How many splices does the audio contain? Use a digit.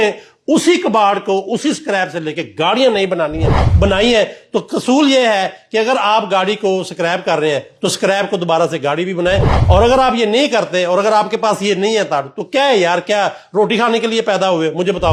0